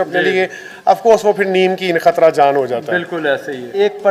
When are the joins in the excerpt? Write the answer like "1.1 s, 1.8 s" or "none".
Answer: none